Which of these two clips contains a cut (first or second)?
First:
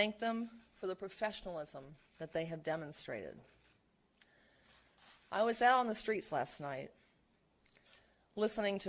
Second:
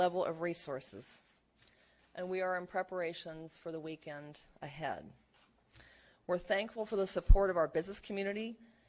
second